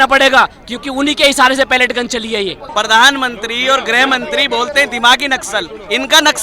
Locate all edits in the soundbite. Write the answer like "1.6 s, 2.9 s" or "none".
2.6 s